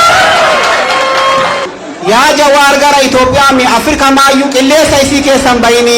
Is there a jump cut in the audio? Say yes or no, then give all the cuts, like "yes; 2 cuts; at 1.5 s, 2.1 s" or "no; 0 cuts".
yes; 1 cut; at 1.6 s